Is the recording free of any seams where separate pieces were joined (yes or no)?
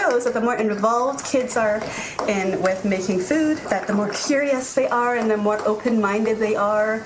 yes